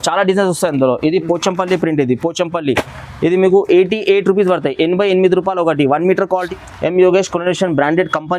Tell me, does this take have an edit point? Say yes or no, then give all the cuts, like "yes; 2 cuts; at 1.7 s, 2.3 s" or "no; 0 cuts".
yes; 1 cut; at 6.4 s